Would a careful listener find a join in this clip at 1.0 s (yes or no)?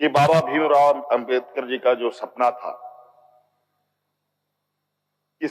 yes